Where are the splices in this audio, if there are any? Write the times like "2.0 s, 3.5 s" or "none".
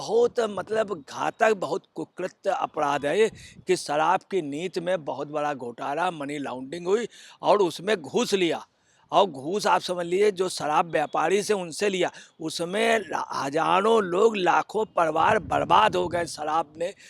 none

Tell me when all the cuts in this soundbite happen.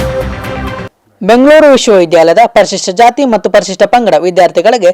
0.9 s

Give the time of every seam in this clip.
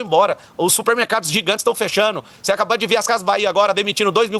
none

